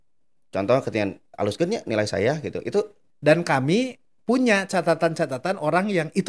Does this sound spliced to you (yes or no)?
yes